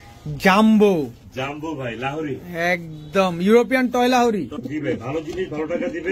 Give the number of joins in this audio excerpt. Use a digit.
1